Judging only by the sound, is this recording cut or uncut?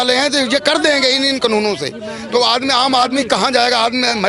uncut